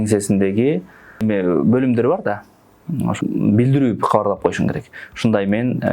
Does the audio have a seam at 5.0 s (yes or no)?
no